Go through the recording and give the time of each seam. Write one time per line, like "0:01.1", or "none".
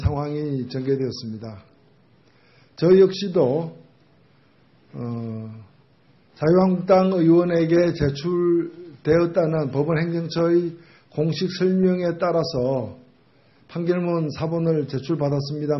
none